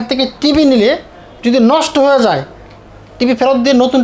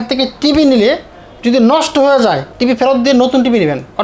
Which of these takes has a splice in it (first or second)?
second